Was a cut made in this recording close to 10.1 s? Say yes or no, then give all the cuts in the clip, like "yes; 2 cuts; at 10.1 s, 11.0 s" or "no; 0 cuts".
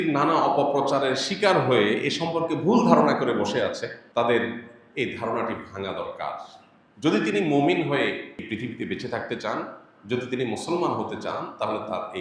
no; 2 cuts; at 4.0 s, 8.4 s